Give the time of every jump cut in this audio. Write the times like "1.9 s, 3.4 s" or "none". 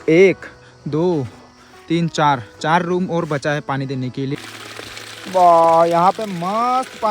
4.4 s